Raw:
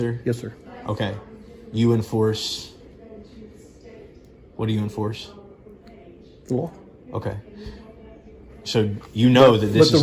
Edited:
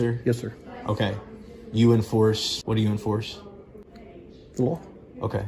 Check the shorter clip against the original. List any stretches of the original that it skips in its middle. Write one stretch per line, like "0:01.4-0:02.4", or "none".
0:02.5-0:04.4